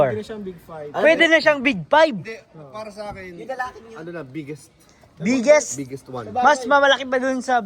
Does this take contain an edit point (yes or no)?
no